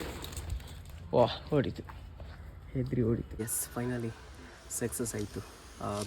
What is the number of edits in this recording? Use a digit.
1